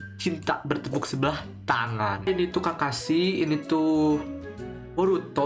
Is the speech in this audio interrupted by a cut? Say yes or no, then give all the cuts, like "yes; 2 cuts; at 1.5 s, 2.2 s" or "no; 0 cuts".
yes; 1 cut; at 2.3 s